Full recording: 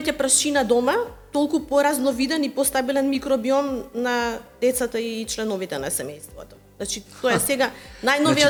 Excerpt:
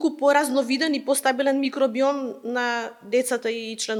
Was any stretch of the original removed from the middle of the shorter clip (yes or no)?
no